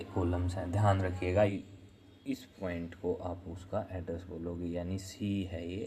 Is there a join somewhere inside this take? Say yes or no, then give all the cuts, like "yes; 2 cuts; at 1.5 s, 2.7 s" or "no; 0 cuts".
yes; 1 cut; at 1.5 s